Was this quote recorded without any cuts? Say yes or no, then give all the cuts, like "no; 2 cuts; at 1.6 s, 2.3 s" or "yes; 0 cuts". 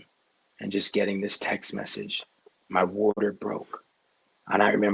no; 1 cut; at 3.2 s